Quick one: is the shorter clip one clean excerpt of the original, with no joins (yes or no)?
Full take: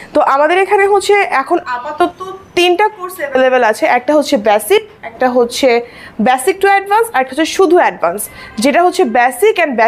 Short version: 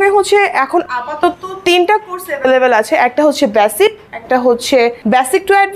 no